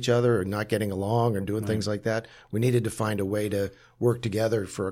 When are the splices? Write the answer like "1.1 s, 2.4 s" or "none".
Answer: none